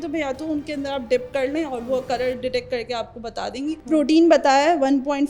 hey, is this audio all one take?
no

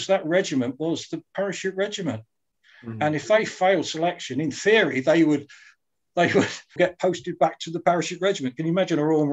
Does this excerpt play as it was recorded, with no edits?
no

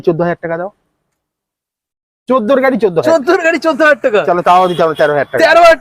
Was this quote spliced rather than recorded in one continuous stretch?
no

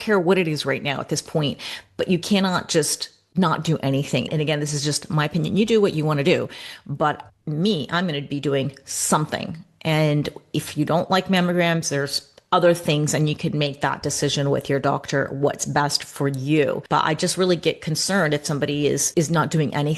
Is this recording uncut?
no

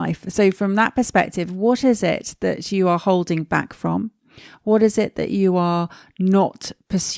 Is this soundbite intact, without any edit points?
yes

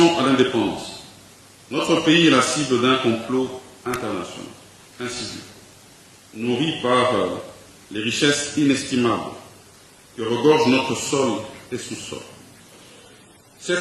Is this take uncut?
yes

